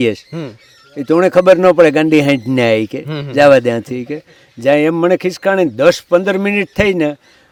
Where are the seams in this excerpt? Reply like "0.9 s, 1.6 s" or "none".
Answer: none

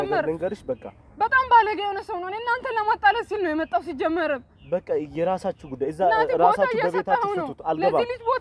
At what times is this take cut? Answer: none

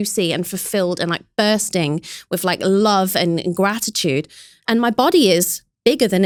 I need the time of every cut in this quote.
none

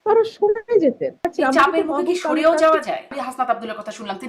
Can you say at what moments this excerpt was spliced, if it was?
1.3 s, 3.1 s

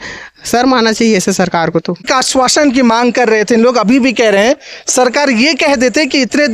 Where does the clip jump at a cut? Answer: 2.0 s

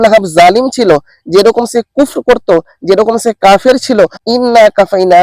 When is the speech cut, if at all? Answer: 4.2 s

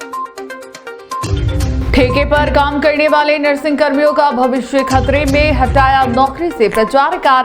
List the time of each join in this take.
1.7 s

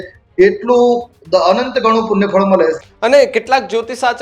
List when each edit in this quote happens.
2.8 s

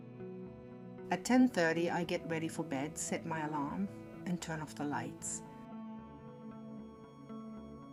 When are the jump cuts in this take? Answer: none

